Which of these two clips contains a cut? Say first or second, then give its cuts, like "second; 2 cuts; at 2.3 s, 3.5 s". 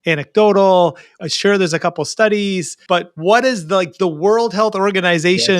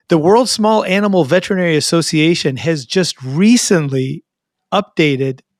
first; 2 cuts; at 1.1 s, 2.7 s